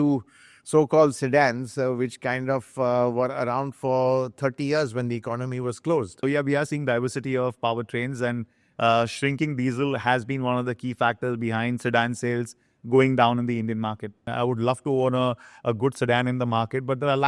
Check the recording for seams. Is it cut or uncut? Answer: cut